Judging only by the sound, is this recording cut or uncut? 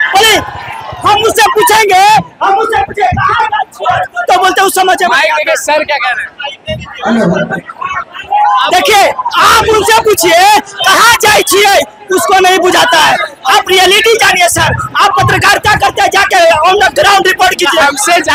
uncut